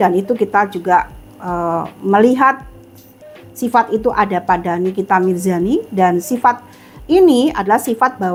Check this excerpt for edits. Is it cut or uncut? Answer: uncut